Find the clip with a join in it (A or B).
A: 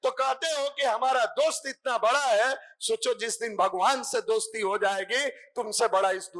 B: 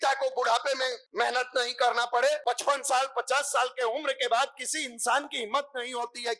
B